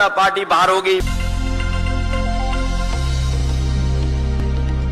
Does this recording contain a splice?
no; 0 cuts

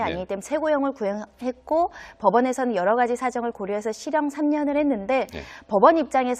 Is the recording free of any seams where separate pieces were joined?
yes; 0 cuts

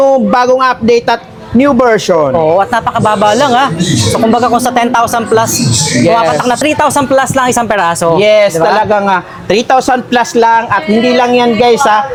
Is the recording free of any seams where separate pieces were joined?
yes; 0 cuts

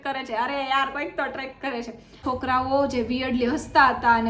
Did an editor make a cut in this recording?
yes; 1 cut; at 2.2 s

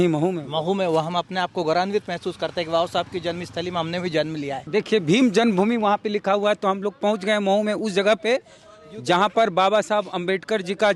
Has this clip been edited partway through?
yes; 1 cut; at 4.6 s

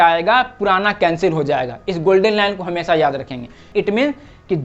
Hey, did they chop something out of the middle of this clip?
yes; 1 cut; at 3.5 s

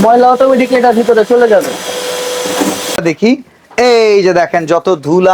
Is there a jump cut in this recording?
yes; 1 cut; at 3.0 s

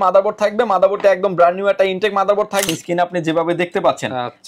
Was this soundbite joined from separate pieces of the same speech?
yes; 1 cut; at 2.7 s

